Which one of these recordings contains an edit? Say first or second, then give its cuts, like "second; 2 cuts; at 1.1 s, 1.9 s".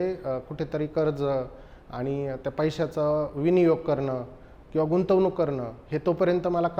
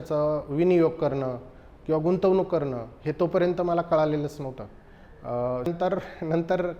second; 1 cut; at 5.7 s